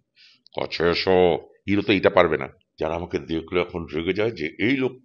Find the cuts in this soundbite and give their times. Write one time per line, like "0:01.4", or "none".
0:02.6